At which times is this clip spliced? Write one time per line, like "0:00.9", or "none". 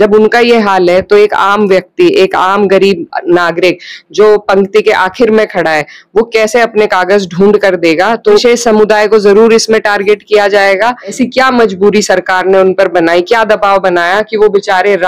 0:08.4
0:11.2